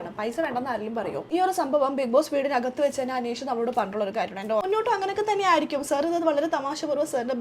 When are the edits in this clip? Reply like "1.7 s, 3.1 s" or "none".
1.3 s, 4.6 s